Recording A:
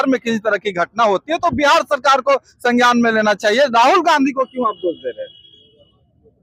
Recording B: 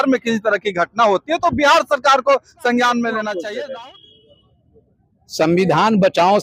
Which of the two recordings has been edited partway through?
B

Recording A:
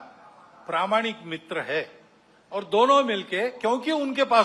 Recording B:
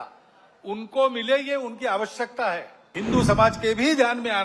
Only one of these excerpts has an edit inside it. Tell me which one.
B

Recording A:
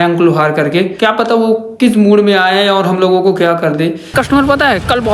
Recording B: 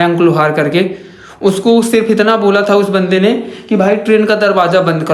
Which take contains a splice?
A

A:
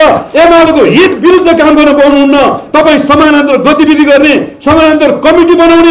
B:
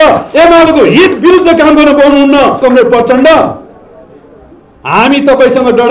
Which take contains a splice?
B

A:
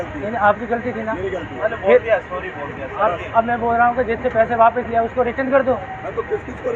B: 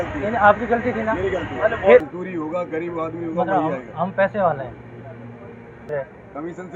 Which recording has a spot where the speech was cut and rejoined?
B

